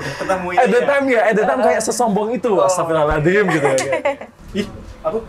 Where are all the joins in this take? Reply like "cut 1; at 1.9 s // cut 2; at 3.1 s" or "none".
cut 1; at 4.4 s